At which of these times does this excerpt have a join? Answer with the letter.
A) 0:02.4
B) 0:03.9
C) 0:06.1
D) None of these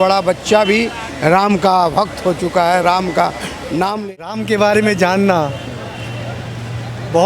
B